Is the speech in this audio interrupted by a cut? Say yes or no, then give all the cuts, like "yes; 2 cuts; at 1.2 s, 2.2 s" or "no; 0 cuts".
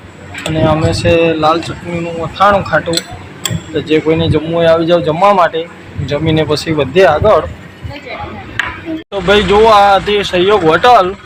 no; 0 cuts